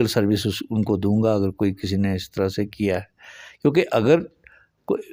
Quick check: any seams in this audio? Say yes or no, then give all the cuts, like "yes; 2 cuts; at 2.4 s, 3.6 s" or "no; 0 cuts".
no; 0 cuts